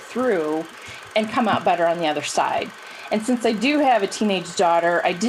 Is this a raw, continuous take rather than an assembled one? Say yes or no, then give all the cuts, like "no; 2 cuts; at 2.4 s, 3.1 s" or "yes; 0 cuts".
yes; 0 cuts